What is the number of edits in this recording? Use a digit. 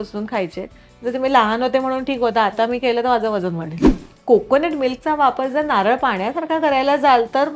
1